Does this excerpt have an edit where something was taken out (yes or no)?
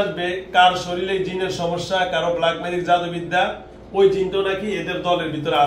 no